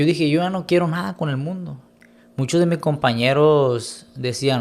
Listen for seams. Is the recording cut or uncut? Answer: cut